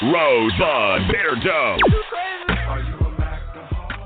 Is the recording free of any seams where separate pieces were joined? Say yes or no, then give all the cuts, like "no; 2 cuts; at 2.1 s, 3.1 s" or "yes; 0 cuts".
yes; 0 cuts